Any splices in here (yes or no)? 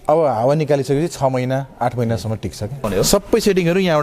yes